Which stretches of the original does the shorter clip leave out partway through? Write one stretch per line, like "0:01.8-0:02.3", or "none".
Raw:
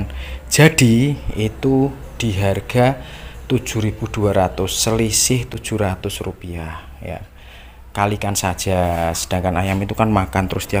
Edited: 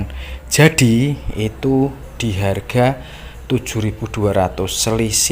none